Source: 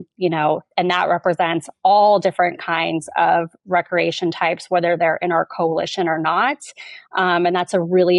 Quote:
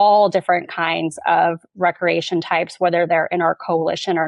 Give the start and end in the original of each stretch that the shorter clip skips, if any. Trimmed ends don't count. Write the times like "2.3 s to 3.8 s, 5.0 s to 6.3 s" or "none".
none